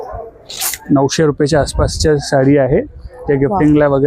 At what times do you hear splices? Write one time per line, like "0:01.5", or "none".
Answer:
none